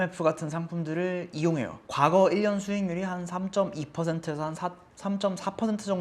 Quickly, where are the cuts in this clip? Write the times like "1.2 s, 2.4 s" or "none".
1.8 s